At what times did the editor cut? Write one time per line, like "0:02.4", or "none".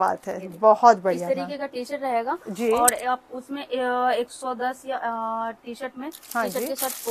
none